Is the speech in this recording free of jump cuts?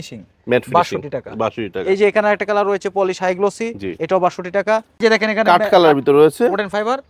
no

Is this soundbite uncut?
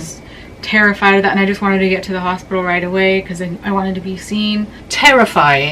no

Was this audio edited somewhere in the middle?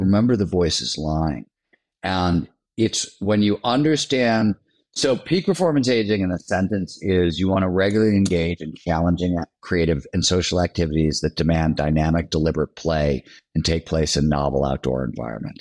no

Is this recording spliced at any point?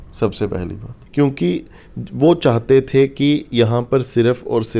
yes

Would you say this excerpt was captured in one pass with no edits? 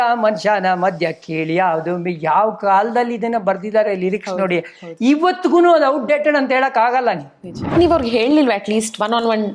no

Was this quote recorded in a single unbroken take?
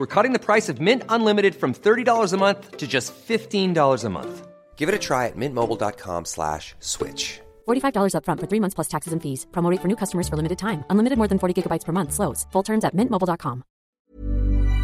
no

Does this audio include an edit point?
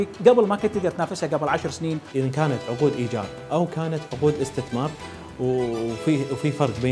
yes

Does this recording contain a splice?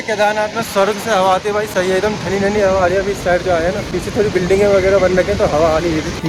no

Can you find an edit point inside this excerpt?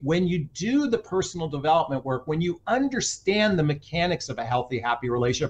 no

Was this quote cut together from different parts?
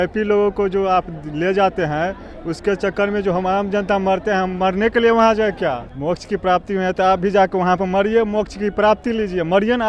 yes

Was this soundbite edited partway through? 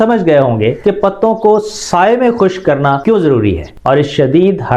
yes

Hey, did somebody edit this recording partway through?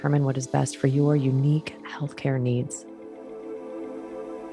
yes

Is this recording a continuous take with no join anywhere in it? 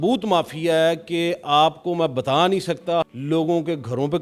no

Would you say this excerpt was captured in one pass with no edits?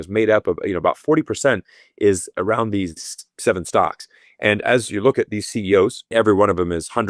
no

